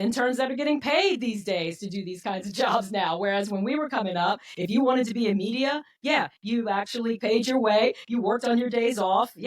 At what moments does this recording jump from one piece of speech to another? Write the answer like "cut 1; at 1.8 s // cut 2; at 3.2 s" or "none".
cut 1; at 7.2 s